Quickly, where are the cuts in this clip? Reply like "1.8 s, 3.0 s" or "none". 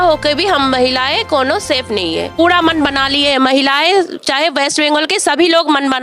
2.3 s